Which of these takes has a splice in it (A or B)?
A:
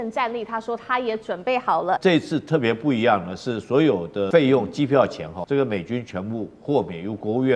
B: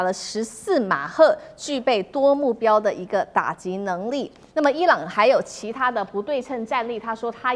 A